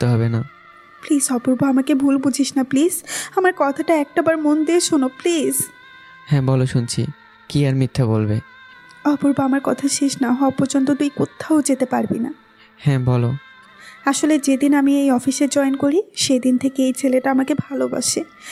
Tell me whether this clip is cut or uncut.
uncut